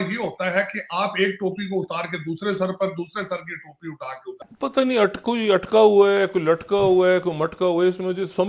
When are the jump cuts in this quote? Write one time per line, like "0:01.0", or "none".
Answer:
0:04.5